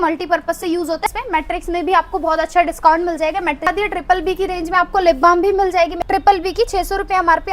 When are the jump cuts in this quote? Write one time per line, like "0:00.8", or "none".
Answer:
0:01.1
0:03.7
0:05.9